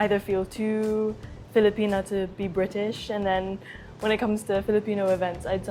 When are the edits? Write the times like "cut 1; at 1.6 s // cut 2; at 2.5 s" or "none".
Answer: none